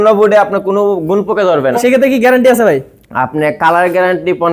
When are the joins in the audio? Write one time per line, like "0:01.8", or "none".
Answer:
0:01.8

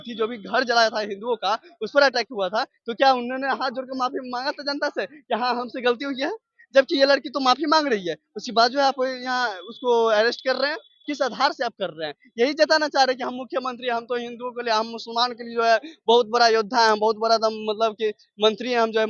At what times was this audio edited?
none

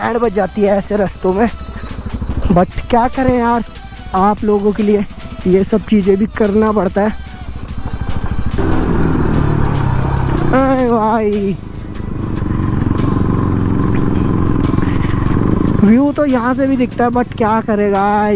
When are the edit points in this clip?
none

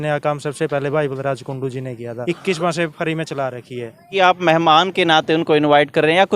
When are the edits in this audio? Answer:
0:02.1
0:04.1

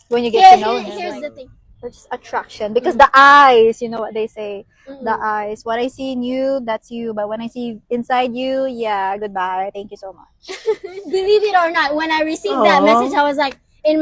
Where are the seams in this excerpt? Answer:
0:01.1
0:10.9

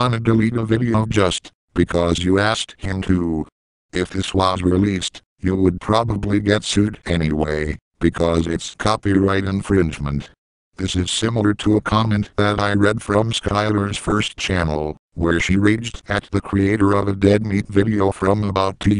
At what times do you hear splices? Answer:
0:07.6

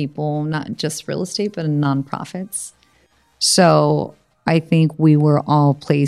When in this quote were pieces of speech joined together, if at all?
0:02.9

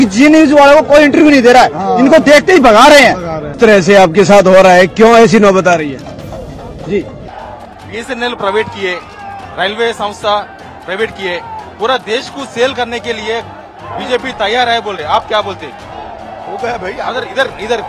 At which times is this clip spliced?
0:03.5
0:07.2
0:15.9

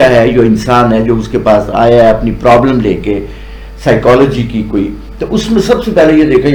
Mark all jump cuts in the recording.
none

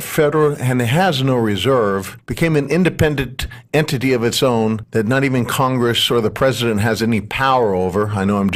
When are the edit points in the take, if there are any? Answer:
none

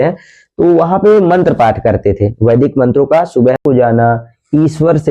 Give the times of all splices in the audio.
0:03.6

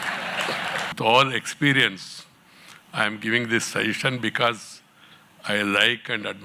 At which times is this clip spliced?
0:00.9

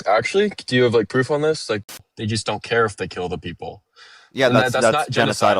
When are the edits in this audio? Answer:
0:01.8

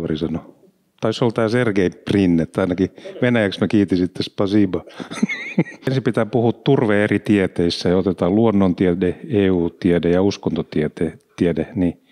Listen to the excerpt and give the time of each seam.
0:05.9

